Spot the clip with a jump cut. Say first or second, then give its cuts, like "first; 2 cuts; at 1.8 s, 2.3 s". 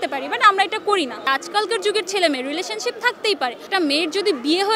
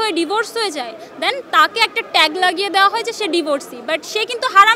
first; 2 cuts; at 1.3 s, 3.6 s